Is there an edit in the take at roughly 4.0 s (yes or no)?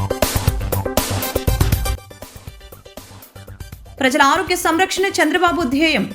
yes